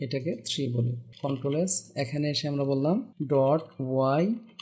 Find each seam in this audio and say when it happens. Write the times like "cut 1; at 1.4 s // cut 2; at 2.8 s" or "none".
cut 1; at 1.0 s // cut 2; at 3.1 s

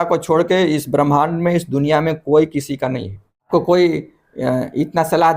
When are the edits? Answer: cut 1; at 3.5 s

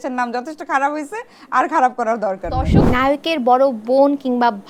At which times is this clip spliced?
cut 1; at 2.8 s

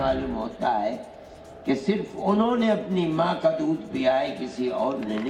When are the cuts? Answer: none

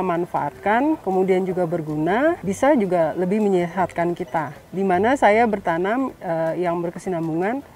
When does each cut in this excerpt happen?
cut 1; at 1.0 s // cut 2; at 2.4 s // cut 3; at 4.6 s

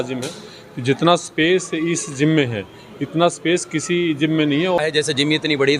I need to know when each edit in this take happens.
cut 1; at 4.8 s

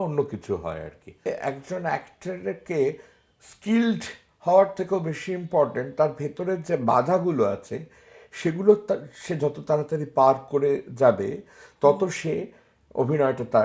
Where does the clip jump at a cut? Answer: cut 1; at 1.2 s

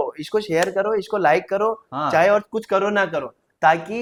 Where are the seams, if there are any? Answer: none

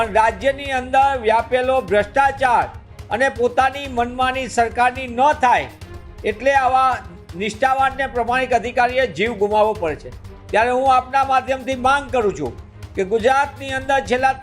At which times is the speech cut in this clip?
none

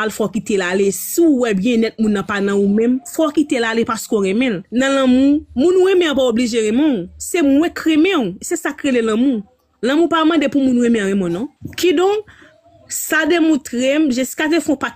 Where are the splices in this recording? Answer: cut 1; at 4.6 s // cut 2; at 11.6 s

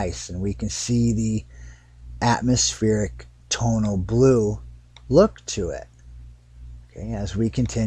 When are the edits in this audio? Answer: cut 1; at 1.3 s

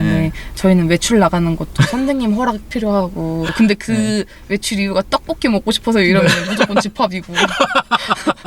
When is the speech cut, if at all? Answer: cut 1; at 3.5 s

